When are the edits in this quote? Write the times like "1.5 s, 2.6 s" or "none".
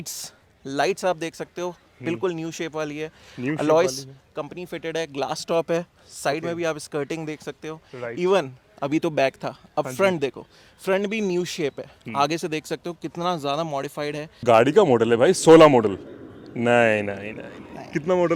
none